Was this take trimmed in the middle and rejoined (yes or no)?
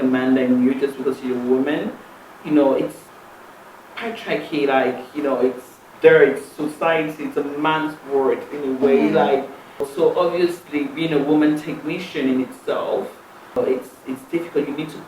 yes